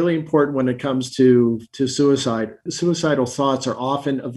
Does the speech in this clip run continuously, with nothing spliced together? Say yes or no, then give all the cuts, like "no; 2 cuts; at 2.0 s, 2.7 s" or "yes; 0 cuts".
yes; 0 cuts